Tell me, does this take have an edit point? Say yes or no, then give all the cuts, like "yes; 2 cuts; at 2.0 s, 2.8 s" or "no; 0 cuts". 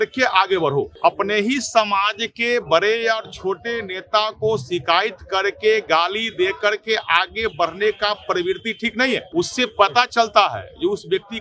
yes; 2 cuts; at 0.9 s, 9.3 s